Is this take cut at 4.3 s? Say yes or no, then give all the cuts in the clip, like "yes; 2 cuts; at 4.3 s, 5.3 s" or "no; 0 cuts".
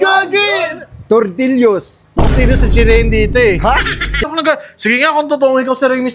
yes; 1 cut; at 4.3 s